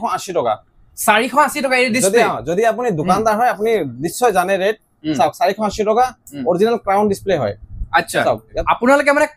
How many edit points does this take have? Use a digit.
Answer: 1